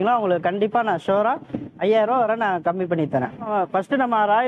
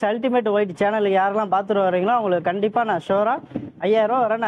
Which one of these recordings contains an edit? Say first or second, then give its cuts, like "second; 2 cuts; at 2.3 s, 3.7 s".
first; 1 cut; at 3.5 s